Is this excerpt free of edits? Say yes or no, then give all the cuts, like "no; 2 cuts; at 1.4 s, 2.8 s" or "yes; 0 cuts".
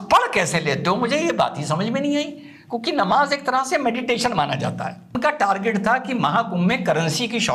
no; 1 cut; at 5.2 s